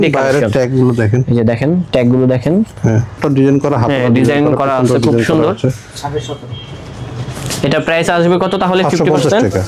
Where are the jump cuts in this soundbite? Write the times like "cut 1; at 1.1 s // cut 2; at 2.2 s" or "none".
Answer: cut 1; at 3.2 s